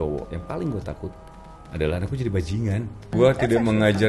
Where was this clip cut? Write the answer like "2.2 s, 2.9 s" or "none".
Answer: 3.1 s